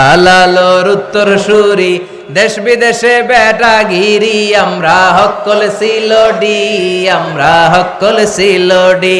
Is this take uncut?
yes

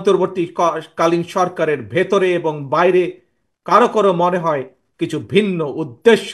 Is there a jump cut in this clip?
no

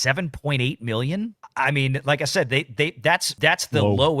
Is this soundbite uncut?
no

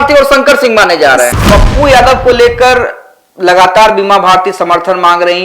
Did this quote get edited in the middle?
yes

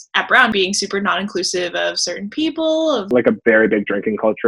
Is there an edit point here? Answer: yes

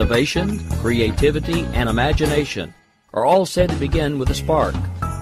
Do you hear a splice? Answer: no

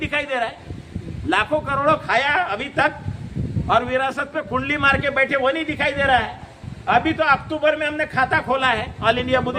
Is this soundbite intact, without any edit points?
yes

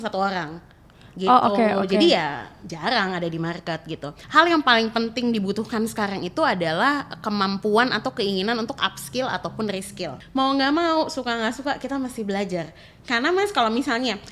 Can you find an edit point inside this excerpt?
yes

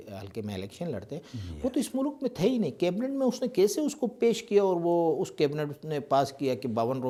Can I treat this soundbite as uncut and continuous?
yes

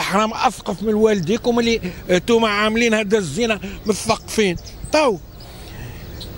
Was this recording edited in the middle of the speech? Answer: no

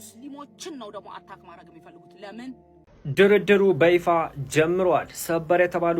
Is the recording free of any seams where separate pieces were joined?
no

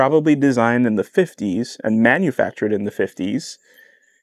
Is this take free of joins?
yes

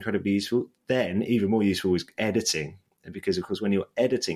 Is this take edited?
no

